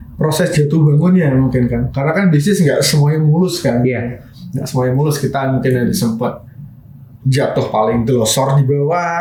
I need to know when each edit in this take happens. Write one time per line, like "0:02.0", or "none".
none

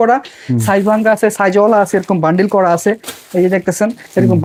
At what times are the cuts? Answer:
none

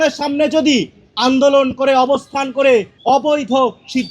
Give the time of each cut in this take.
0:02.9

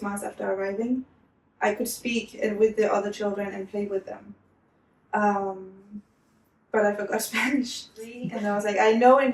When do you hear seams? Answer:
0:08.3

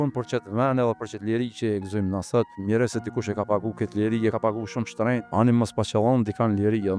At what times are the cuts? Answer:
0:02.6
0:04.8

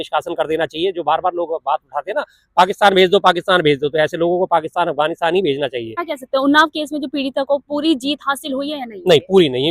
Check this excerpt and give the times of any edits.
0:06.0

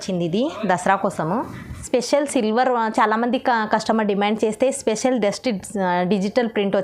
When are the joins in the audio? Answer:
0:01.8

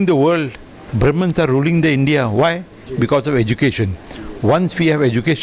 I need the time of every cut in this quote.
none

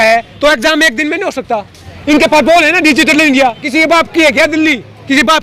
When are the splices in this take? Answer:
0:03.6

